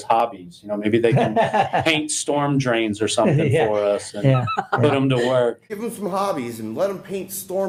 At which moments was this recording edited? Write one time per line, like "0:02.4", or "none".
none